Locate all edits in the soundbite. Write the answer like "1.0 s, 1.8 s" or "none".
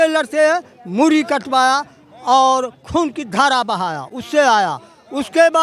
none